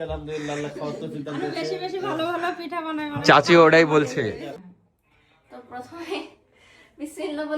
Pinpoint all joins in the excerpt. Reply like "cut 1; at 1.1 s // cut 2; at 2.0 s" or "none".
cut 1; at 4.7 s